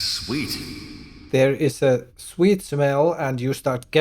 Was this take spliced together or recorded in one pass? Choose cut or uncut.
cut